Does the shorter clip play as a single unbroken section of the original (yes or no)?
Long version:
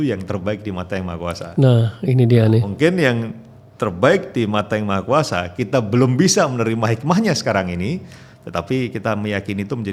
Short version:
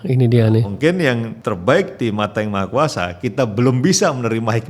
no